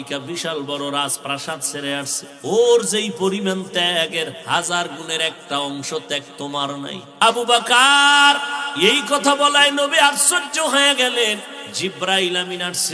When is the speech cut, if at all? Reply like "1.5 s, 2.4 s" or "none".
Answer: 2.2 s, 7.2 s, 8.6 s, 11.6 s